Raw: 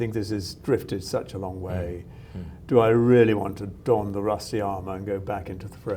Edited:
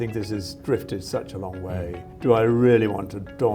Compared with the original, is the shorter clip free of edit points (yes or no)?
no